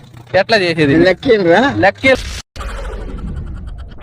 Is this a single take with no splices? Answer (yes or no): no